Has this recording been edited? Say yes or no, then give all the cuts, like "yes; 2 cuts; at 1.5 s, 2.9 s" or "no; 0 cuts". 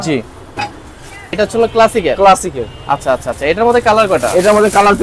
yes; 1 cut; at 1.4 s